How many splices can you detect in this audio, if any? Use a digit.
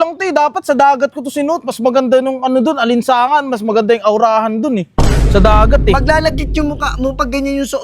0